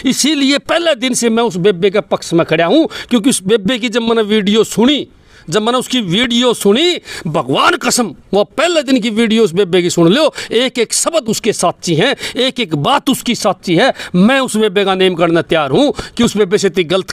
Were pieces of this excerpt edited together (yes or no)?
no